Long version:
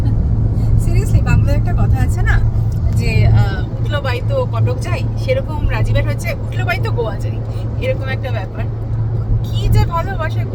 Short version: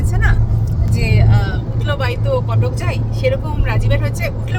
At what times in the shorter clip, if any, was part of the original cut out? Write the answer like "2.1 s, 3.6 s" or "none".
none